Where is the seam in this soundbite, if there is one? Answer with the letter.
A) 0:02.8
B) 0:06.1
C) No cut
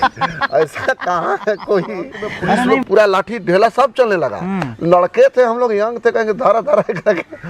A